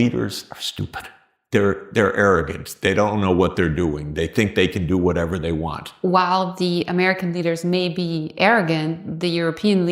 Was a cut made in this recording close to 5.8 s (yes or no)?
yes